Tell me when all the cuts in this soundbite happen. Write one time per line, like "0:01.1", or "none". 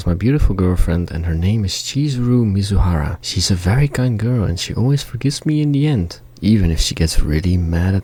none